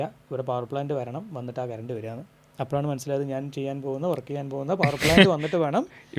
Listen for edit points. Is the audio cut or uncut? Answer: uncut